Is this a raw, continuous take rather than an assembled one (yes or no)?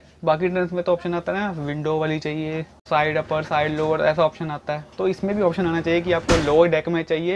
no